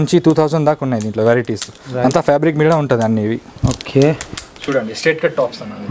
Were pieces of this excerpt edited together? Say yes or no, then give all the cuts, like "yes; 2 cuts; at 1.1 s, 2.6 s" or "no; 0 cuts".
yes; 1 cut; at 4.5 s